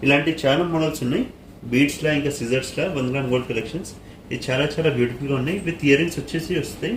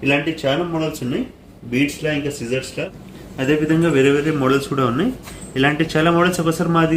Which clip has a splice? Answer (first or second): second